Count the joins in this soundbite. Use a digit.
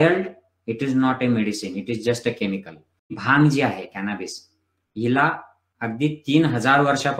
1